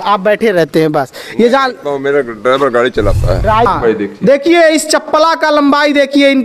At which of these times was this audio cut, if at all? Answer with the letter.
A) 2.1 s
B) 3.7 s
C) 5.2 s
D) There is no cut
B